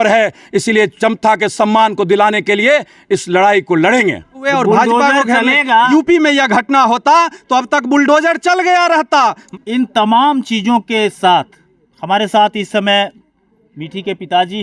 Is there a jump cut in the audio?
yes; 3 cuts; at 4.4 s, 5.9 s, 9.4 s

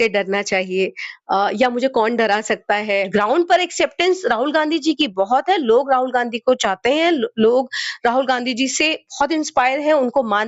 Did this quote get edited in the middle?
yes; 1 cut; at 3.1 s

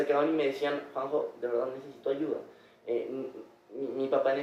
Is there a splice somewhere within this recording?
no; 0 cuts

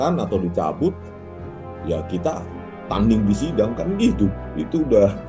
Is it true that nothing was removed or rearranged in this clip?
yes; 0 cuts

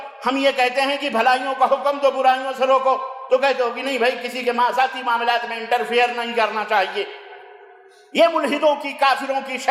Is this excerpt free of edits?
yes; 0 cuts

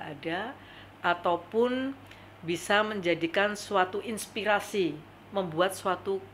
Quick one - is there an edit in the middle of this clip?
no; 0 cuts

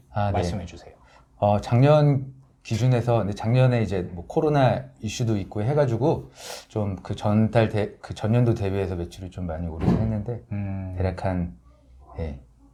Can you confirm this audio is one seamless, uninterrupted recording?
yes; 0 cuts

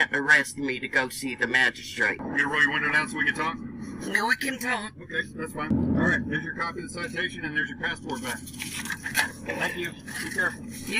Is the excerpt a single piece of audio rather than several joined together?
no; 2 cuts; at 2.2 s, 5.7 s

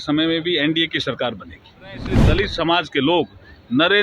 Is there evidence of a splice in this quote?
yes; 1 cut; at 2.2 s

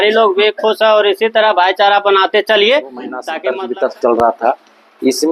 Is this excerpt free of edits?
no; 1 cut; at 3.3 s

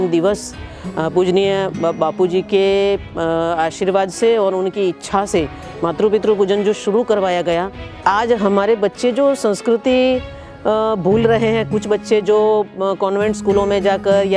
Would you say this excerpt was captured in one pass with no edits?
no; 1 cut; at 8.0 s

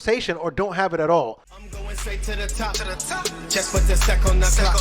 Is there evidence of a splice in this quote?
yes; 1 cut; at 1.5 s

